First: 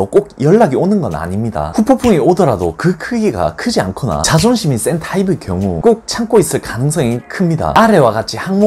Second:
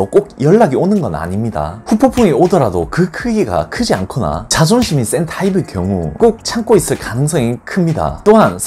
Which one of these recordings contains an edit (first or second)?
first